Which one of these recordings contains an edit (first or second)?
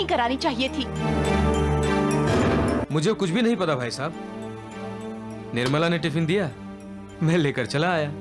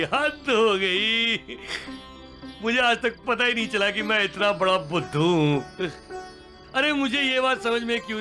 first